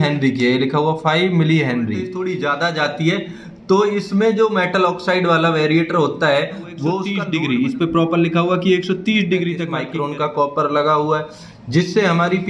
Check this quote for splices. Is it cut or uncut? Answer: cut